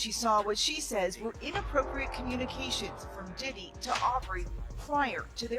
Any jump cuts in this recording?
no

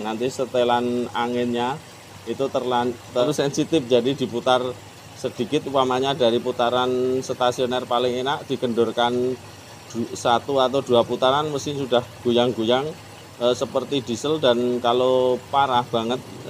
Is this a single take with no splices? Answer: no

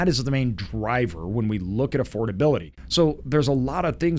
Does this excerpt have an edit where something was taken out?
yes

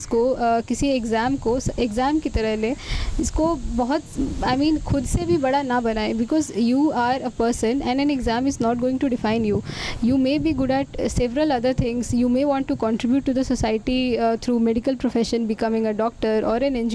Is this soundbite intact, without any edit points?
yes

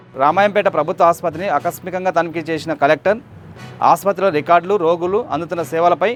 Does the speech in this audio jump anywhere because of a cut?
no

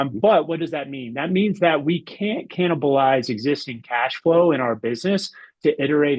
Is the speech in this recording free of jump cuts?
yes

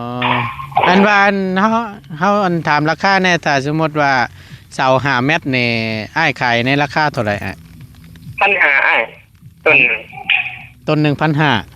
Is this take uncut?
yes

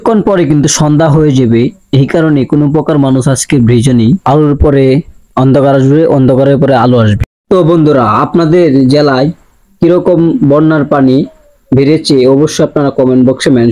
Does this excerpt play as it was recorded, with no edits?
yes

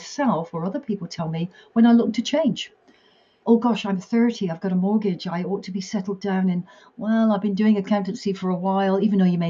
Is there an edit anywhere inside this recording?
no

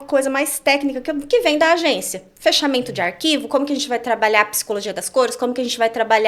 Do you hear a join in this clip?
no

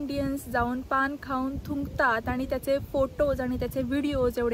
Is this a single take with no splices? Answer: yes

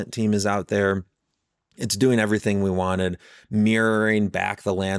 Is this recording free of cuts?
yes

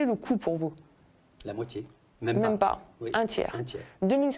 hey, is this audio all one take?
yes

